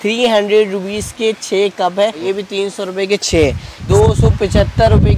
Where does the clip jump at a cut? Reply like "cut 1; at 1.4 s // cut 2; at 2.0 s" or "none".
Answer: cut 1; at 2.2 s // cut 2; at 3.8 s